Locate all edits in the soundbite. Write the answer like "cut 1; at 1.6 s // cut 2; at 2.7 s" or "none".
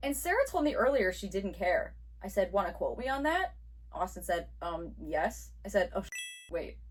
none

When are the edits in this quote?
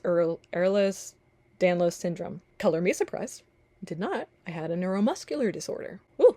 none

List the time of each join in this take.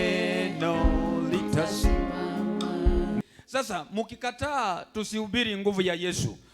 cut 1; at 3.3 s

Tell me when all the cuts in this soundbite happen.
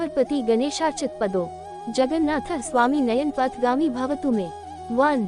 none

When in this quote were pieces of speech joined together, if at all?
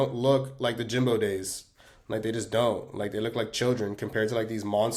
none

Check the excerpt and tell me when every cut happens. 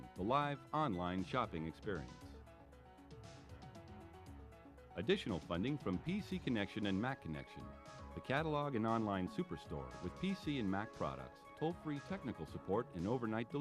cut 1; at 2.1 s // cut 2; at 4.7 s

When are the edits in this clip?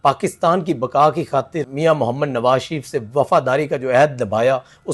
cut 1; at 1.7 s

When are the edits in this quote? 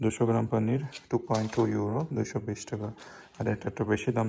none

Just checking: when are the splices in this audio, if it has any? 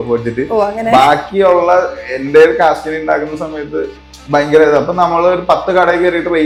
none

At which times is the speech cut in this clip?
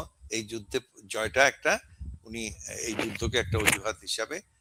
none

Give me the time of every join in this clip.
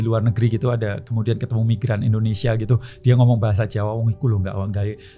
none

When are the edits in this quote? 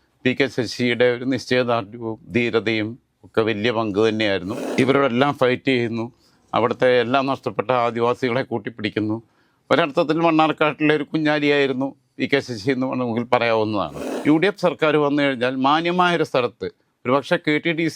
cut 1; at 4.6 s // cut 2; at 14.0 s

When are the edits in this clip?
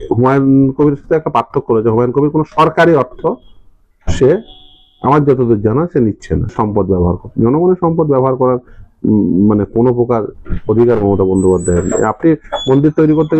cut 1; at 6.5 s

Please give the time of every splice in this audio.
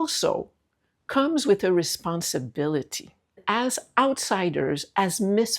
cut 1; at 3.4 s

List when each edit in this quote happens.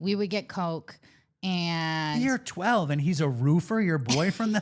none

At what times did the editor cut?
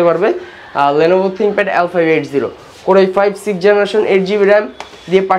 none

